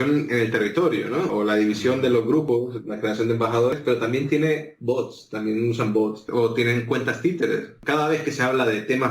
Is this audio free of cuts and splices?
no; 1 cut; at 1.3 s

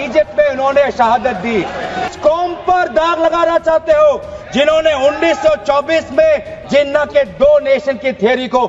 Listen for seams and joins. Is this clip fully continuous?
no; 1 cut; at 2.1 s

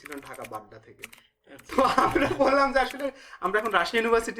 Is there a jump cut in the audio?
no; 0 cuts

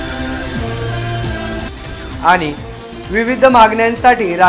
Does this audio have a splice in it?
yes; 1 cut; at 1.6 s

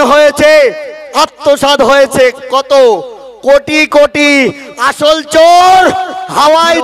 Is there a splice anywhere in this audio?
no; 0 cuts

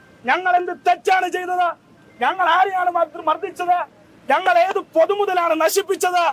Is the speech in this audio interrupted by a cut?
no; 0 cuts

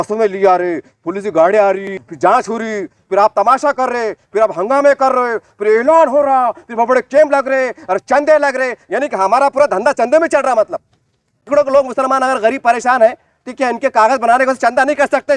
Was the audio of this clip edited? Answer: yes; 2 cuts; at 2.1 s, 11.5 s

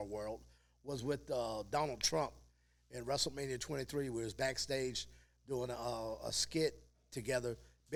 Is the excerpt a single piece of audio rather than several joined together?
yes; 0 cuts

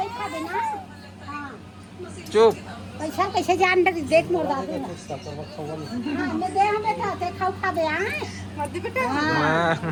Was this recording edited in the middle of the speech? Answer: no; 0 cuts

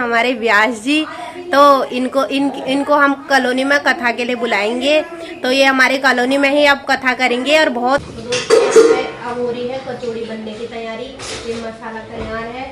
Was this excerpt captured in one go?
no; 1 cut; at 8.0 s

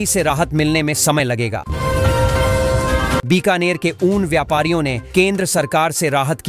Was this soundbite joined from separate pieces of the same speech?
yes; 2 cuts; at 1.6 s, 3.2 s

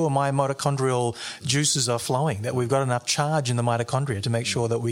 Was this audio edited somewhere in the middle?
no; 0 cuts

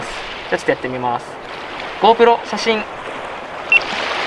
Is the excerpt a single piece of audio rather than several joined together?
yes; 0 cuts

